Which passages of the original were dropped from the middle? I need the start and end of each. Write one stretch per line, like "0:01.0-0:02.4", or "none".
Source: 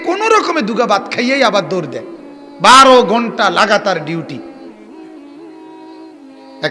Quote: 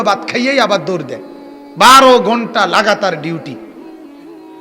0:04.5-0:04.8